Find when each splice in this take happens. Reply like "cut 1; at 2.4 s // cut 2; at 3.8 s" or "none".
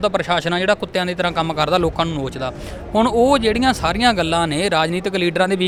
none